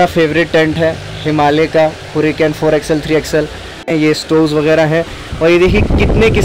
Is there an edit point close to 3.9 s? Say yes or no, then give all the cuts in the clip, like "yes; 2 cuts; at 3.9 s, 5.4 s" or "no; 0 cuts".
yes; 1 cut; at 3.9 s